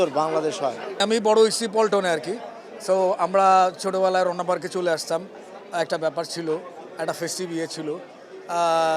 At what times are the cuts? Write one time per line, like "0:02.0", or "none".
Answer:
0:01.0